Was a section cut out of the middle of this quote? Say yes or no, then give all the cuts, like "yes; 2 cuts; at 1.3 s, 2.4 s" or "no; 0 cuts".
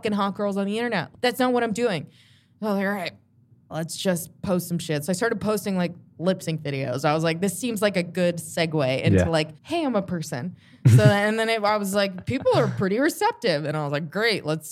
no; 0 cuts